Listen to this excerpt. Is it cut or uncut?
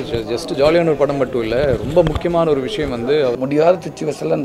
cut